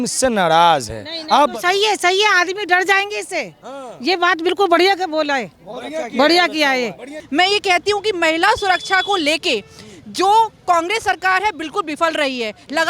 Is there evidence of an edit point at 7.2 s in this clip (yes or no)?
yes